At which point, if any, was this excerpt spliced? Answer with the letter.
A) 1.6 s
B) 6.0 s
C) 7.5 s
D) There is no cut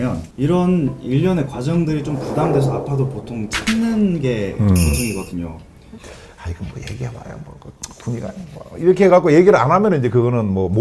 B